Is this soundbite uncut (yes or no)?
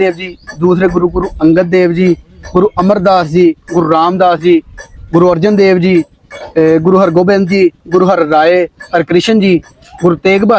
yes